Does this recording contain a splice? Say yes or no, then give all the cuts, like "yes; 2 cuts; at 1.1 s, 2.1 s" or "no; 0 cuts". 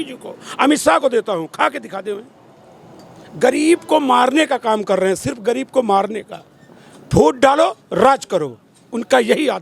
no; 0 cuts